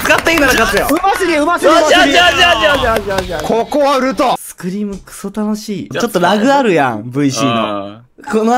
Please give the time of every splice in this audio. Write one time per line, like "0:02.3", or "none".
0:04.5
0:05.9